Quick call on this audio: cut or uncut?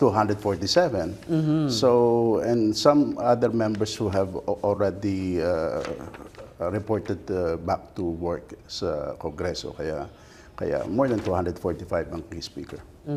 uncut